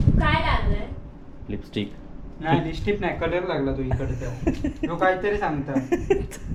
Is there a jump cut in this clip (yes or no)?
no